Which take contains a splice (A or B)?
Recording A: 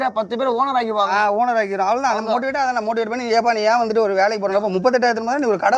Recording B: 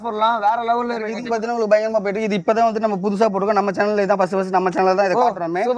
B